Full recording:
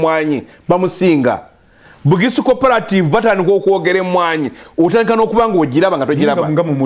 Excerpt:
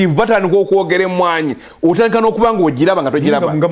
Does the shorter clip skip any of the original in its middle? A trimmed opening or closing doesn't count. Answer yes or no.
no